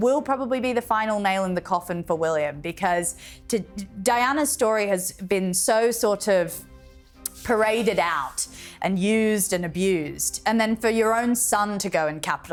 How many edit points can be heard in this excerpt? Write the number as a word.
zero